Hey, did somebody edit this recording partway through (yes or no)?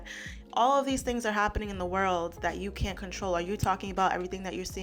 no